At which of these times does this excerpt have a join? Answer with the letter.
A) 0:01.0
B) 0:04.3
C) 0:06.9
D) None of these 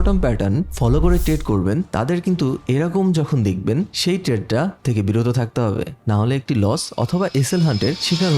D